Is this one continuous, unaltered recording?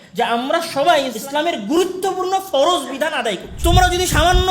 no; 2 cuts; at 1.2 s, 3.5 s

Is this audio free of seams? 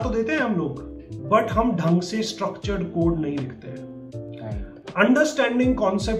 yes; 0 cuts

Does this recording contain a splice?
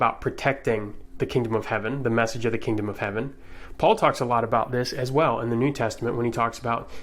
no; 0 cuts

